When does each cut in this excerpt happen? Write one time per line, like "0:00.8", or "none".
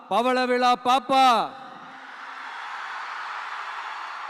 none